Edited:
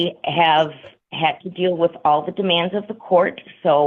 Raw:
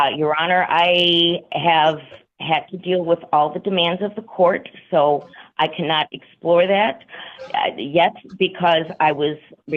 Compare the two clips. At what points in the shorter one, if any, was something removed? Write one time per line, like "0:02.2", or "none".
none